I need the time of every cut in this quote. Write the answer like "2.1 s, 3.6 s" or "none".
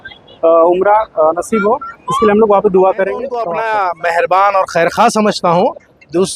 3.4 s